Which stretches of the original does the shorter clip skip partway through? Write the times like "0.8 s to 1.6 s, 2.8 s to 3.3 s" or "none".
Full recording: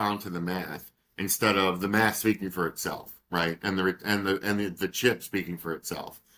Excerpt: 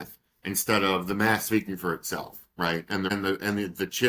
3.8 s to 4.1 s

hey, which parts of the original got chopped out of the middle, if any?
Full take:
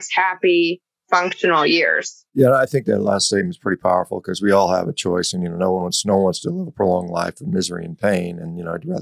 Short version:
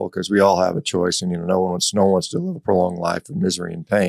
none

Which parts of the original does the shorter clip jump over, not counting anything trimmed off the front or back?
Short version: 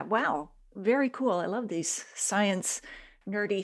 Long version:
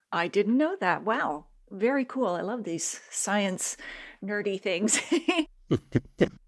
none

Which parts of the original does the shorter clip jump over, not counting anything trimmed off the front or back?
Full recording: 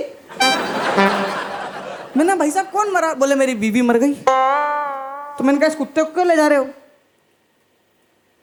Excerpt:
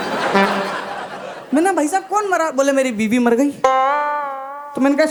none

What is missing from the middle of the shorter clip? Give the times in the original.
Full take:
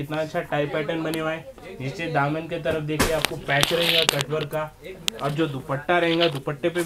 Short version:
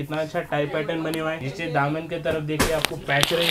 1.5 s to 1.9 s

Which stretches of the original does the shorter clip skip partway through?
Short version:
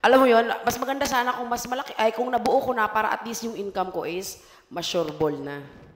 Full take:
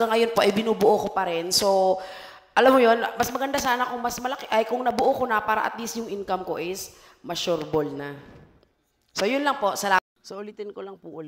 none

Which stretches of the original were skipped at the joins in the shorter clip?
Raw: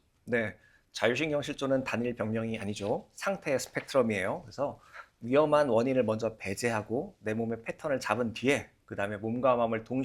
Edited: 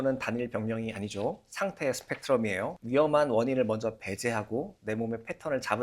4.4 s to 5.2 s

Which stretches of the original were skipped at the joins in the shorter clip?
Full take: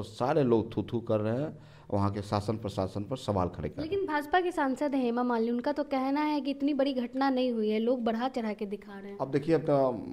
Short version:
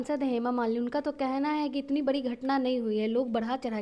none

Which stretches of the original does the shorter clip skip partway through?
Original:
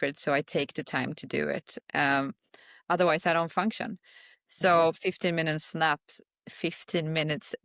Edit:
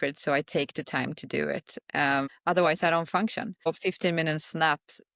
2.3 s to 2.8 s, 4.1 s to 4.9 s

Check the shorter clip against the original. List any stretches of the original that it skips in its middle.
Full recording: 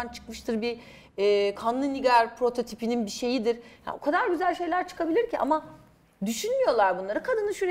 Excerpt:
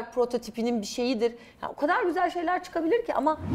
none

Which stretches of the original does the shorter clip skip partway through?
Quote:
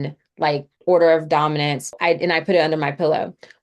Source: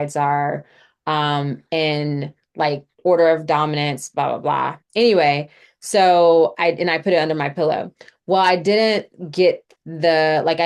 4.1 s to 6.5 s

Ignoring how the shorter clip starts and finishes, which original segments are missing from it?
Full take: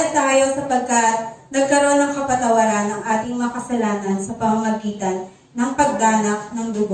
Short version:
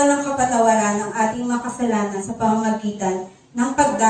4.1 s to 4.2 s

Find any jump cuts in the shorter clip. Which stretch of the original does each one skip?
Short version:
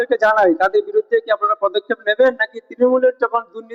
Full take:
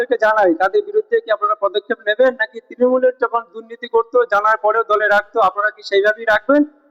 none

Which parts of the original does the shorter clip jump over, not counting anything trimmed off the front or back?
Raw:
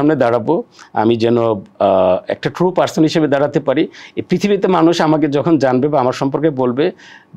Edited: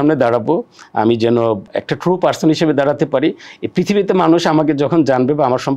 1.7 s to 2.2 s

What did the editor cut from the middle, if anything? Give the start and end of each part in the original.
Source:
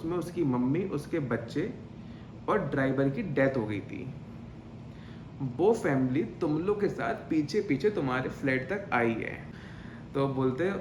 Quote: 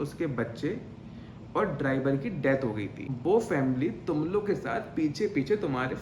4.0 s to 5.4 s

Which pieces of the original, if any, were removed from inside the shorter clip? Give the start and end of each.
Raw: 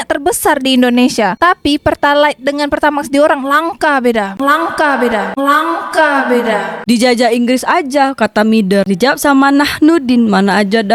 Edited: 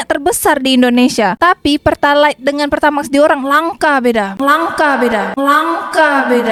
none

